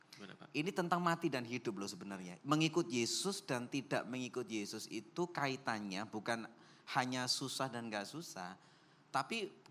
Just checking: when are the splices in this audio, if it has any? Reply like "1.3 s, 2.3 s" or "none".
none